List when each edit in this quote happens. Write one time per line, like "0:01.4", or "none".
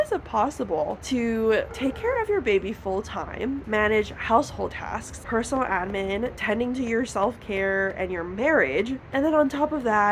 0:01.0
0:01.7
0:03.6
0:05.1
0:06.4
0:09.0